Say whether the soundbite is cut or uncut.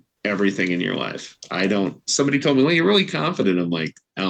uncut